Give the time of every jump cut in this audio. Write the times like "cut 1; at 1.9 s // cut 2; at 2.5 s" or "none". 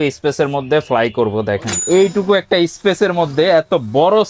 none